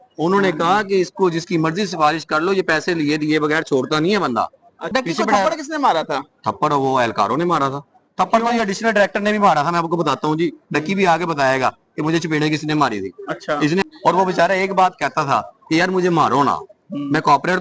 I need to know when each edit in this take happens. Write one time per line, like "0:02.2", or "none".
0:04.8
0:13.8